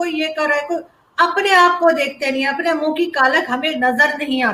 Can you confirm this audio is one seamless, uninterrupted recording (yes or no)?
yes